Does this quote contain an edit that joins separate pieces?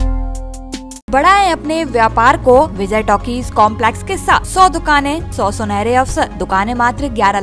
yes; 5 cuts; at 1.1 s, 2.8 s, 4.5 s, 5.3 s, 6.4 s

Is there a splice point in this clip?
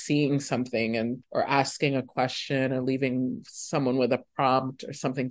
yes; 1 cut; at 1.2 s

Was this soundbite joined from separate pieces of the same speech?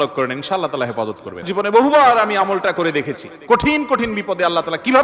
yes; 1 cut; at 1.4 s

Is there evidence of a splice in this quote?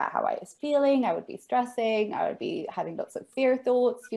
no; 0 cuts

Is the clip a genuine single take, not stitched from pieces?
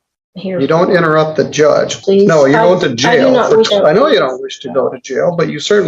no; 2 cuts; at 2.0 s, 3.7 s

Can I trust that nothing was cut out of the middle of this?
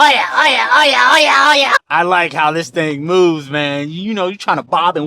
no; 1 cut; at 1.8 s

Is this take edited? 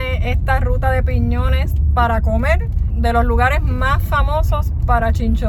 no; 0 cuts

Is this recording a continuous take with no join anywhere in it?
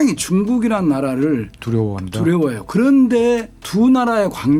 yes; 0 cuts

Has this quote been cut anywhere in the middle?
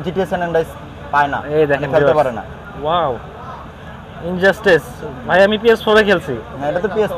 no; 0 cuts

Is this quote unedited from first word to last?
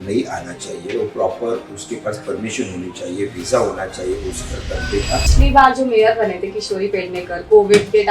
no; 1 cut; at 5.3 s

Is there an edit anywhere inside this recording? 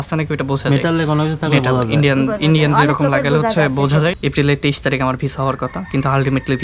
yes; 1 cut; at 4.2 s

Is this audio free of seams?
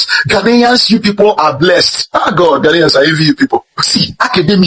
no; 2 cuts; at 1.9 s, 3.8 s

